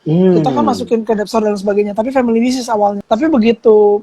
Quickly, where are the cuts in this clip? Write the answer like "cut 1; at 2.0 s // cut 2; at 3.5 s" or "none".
cut 1; at 3.0 s